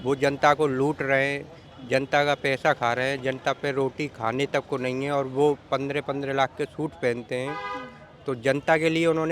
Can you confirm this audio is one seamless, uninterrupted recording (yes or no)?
yes